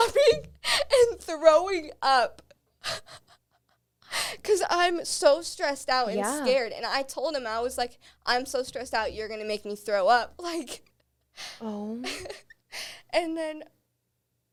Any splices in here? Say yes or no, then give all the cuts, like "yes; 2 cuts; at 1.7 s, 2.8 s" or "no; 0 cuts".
no; 0 cuts